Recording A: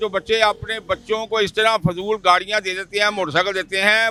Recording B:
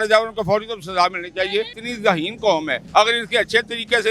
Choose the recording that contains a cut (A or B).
B